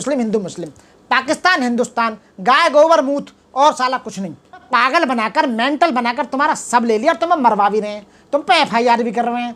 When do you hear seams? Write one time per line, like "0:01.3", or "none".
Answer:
0:04.7